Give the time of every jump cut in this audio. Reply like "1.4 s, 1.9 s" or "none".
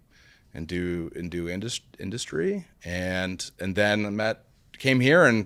none